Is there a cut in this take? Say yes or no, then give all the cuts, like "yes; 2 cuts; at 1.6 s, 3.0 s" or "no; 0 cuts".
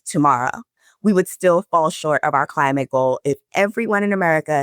yes; 1 cut; at 3.4 s